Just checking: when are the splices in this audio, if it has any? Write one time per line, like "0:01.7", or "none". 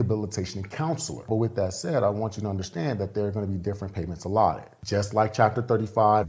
0:01.3
0:04.7